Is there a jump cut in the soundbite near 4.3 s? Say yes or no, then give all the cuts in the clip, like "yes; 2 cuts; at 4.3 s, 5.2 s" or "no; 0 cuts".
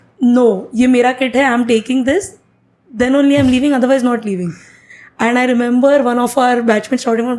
no; 0 cuts